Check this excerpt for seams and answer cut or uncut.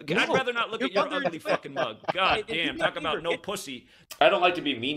uncut